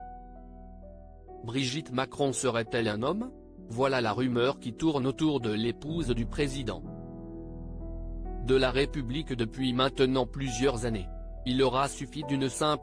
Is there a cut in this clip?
yes; 3 cuts; at 1.4 s, 6.8 s, 8.3 s

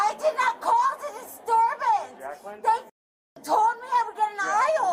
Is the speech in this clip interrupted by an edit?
no; 0 cuts

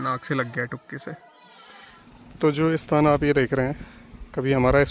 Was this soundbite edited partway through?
yes; 1 cut; at 2.1 s

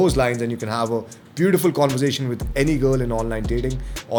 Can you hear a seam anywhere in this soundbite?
no; 0 cuts

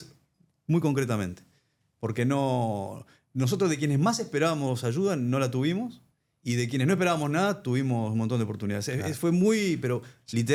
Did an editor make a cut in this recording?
no; 0 cuts

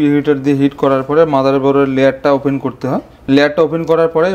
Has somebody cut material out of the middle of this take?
no; 0 cuts

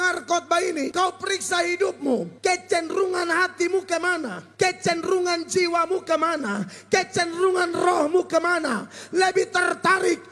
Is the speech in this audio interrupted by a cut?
yes; 3 cuts; at 0.9 s, 2.3 s, 4.4 s

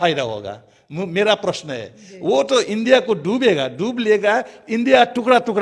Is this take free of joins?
yes; 0 cuts

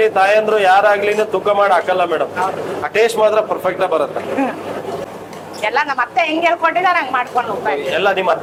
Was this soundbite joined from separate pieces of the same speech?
no; 0 cuts

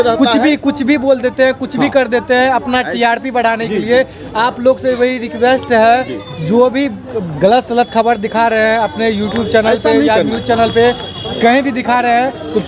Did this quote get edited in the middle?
no; 0 cuts

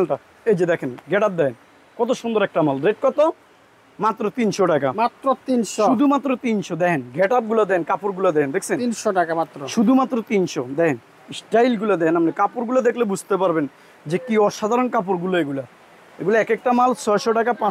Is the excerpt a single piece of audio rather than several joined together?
yes; 0 cuts

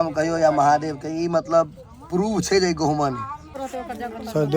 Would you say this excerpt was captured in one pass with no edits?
no; 1 cut; at 3.5 s

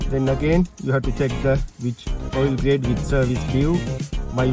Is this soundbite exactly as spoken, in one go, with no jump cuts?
yes; 0 cuts

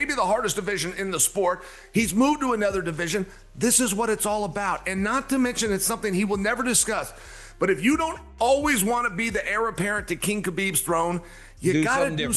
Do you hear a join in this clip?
no; 0 cuts

